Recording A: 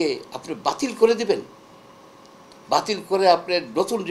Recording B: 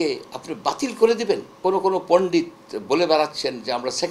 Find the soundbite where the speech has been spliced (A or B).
B